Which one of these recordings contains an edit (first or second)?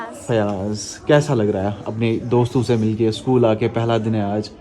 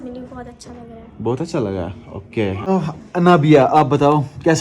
second